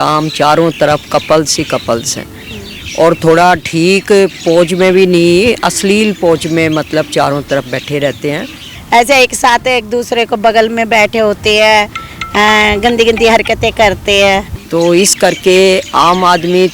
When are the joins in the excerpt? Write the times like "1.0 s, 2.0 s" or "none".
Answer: 8.7 s, 14.6 s